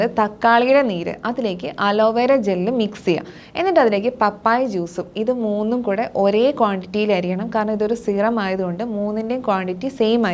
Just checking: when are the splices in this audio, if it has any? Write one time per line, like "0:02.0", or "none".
none